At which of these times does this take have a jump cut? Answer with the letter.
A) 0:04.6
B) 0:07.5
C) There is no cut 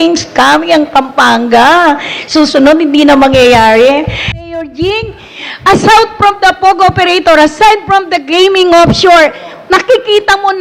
A